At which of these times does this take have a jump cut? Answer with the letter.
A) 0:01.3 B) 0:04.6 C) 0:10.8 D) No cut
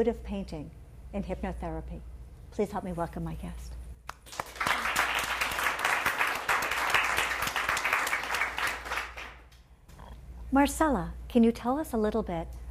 A